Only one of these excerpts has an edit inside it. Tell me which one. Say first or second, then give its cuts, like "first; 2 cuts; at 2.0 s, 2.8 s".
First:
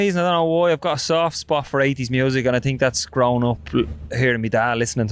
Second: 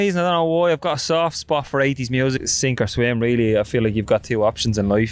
second; 1 cut; at 2.4 s